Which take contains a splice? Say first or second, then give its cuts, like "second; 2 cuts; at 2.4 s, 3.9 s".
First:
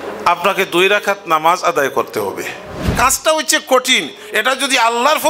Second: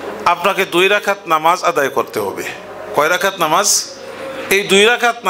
first; 1 cut; at 2.9 s